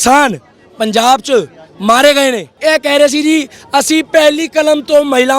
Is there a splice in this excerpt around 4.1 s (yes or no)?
no